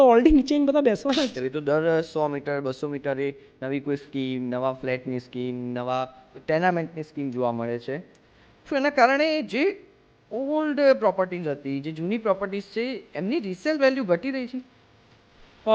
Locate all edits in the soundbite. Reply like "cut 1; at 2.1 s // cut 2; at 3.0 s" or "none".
cut 1; at 1.4 s